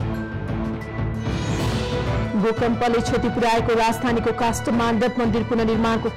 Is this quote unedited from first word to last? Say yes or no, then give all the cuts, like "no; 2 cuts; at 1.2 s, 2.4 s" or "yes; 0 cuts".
yes; 0 cuts